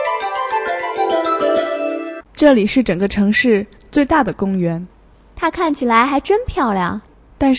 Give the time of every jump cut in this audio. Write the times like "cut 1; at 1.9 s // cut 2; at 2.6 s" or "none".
cut 1; at 2.2 s